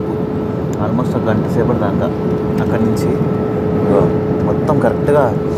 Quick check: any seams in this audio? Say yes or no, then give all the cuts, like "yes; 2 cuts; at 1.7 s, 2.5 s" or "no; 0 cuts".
no; 0 cuts